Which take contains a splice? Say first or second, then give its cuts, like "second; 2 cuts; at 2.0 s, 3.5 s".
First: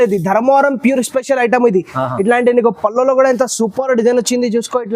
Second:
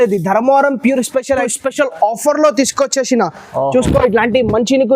second; 1 cut; at 1.4 s